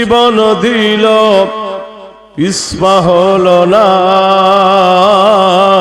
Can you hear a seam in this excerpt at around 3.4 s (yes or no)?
no